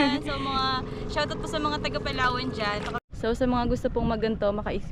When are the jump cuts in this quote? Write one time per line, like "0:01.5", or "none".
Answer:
0:03.0